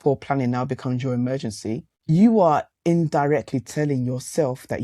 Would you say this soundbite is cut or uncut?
uncut